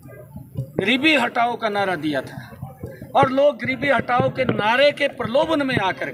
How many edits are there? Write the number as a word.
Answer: zero